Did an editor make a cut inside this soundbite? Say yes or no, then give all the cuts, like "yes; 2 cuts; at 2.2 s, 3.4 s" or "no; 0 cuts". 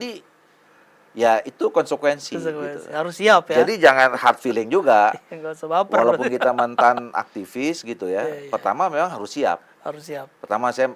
no; 0 cuts